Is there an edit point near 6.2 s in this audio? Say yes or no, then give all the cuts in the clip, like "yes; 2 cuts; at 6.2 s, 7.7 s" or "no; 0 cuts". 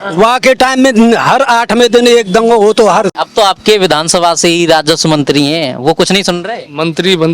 no; 1 cut; at 3.2 s